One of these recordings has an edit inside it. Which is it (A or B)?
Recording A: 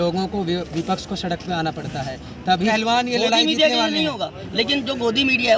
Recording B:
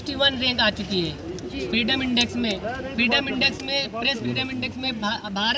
A